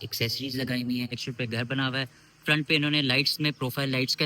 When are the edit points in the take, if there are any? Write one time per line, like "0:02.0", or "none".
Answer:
0:01.2